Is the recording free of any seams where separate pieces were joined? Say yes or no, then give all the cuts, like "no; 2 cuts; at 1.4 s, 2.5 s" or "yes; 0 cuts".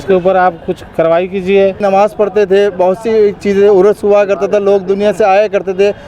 no; 1 cut; at 1.8 s